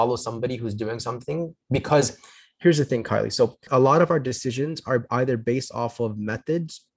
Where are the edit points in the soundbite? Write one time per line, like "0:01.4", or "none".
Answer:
none